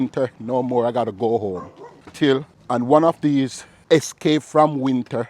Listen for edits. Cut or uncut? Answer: cut